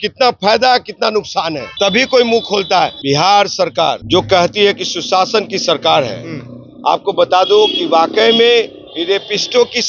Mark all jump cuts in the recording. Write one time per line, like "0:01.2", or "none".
0:01.6
0:03.0
0:04.0